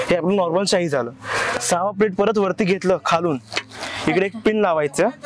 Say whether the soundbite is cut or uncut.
uncut